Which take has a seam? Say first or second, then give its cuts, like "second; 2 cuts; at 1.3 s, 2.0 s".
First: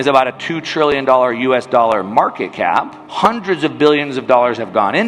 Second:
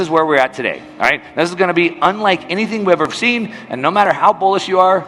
first; 1 cut; at 3.0 s